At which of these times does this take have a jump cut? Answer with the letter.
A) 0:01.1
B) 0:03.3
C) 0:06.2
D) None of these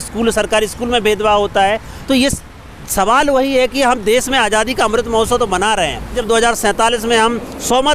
C